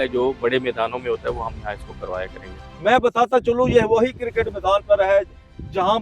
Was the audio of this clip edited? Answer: yes; 1 cut; at 2.6 s

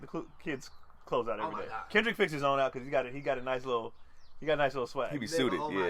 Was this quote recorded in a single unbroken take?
yes; 0 cuts

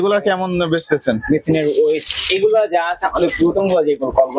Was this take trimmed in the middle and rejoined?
no; 0 cuts

